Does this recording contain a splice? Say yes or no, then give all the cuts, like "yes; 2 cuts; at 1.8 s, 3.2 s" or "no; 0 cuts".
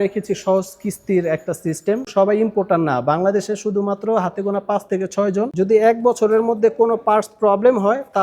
yes; 2 cuts; at 2.1 s, 5.5 s